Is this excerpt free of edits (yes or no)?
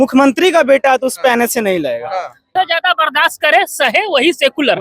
no